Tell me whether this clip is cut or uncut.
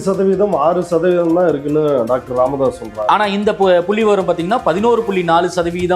uncut